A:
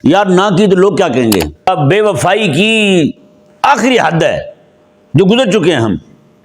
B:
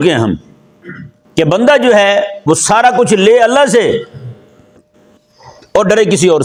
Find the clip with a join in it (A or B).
A